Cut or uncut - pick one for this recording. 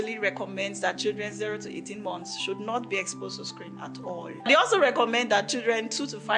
cut